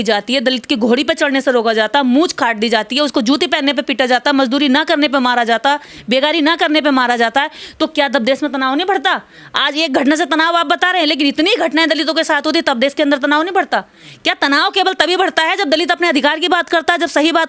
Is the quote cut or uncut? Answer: uncut